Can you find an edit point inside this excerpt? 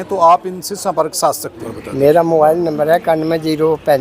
yes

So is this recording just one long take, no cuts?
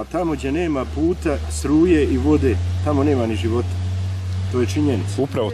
yes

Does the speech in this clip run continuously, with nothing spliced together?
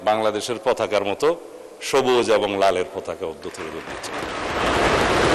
yes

